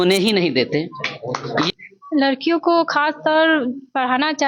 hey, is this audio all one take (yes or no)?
no